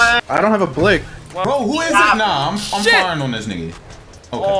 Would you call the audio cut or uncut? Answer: cut